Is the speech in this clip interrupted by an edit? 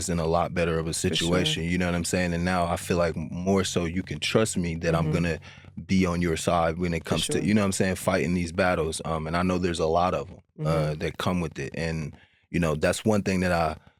no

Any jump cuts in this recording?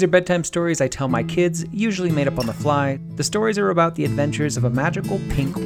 yes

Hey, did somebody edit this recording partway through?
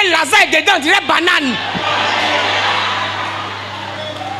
no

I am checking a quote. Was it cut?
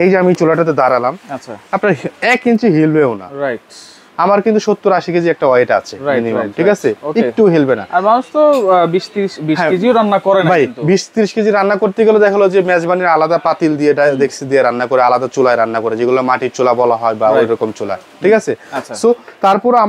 no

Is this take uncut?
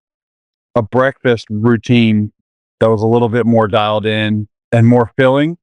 no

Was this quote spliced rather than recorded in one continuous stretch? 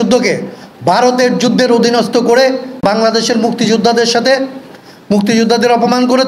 yes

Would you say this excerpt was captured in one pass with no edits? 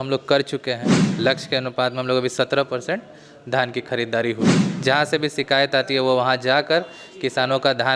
no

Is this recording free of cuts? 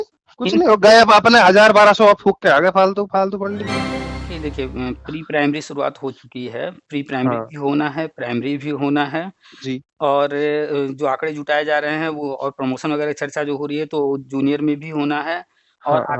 no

